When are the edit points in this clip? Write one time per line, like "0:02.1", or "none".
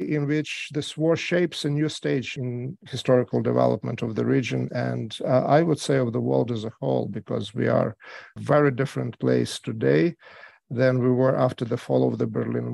0:02.3
0:08.3